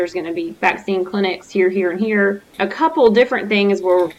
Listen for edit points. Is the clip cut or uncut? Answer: cut